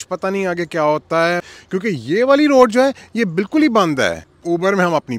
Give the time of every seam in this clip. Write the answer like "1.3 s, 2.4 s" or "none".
1.5 s, 4.3 s